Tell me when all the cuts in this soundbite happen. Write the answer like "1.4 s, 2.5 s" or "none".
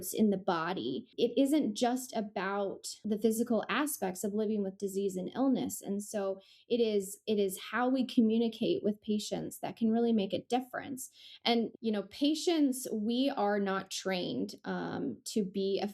1.1 s, 3.0 s, 11.7 s